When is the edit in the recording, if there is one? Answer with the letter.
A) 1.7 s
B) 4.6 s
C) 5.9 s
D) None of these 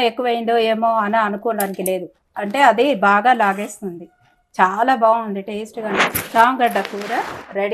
C